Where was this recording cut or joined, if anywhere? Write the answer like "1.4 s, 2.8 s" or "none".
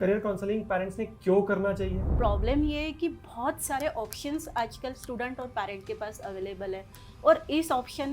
2.1 s